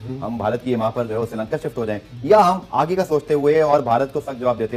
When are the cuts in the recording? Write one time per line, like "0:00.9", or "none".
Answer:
none